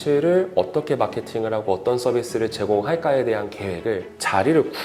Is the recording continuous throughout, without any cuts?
yes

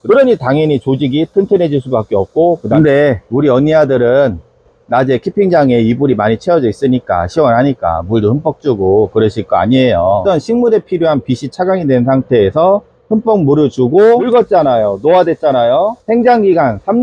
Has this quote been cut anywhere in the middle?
yes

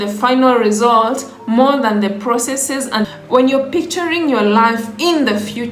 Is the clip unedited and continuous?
no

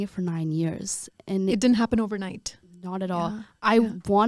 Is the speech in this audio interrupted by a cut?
no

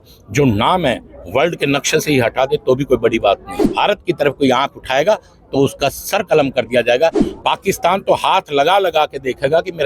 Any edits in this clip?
yes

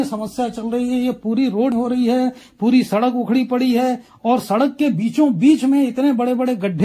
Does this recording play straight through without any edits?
no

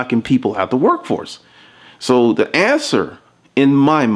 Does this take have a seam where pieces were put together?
no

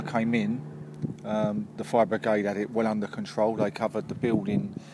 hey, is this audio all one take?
yes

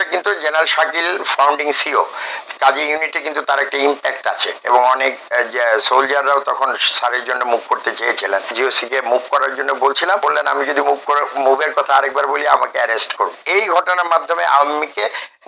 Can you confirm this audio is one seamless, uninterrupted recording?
no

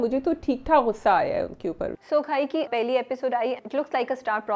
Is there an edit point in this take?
yes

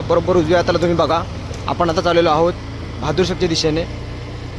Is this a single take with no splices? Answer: yes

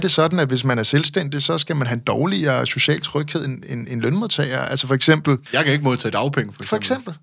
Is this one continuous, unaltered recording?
no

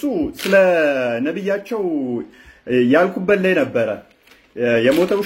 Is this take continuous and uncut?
yes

